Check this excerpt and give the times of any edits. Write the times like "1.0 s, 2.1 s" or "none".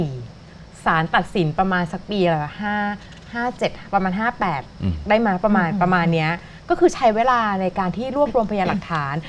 none